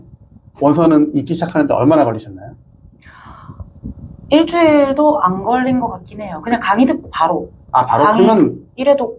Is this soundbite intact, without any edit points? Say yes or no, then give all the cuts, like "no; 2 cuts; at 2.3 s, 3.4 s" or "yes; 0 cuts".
yes; 0 cuts